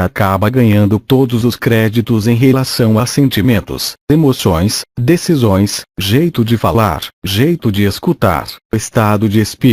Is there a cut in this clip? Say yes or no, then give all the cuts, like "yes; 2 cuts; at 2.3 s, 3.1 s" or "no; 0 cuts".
yes; 1 cut; at 6.9 s